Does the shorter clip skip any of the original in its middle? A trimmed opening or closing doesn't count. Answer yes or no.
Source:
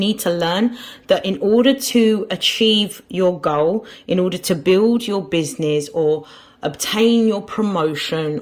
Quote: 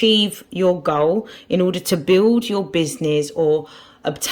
no